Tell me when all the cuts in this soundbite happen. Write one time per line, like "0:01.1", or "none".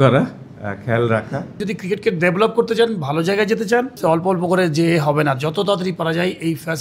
0:01.6
0:04.0

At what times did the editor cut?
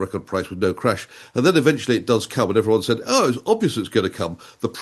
none

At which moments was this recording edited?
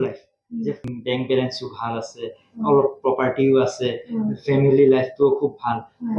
0:00.9

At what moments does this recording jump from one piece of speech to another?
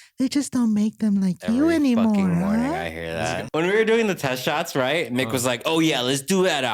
0:03.4

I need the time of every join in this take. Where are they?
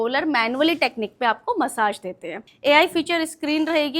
0:02.4

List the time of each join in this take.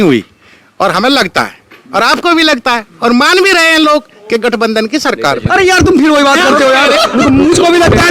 0:01.1

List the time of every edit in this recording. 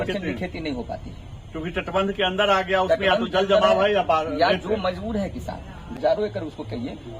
0:05.9

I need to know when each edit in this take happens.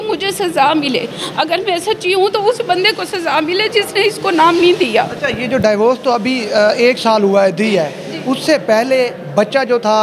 none

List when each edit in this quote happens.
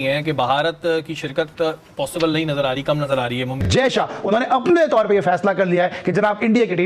0:03.6

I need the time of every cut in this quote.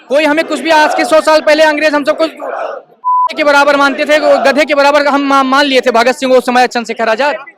none

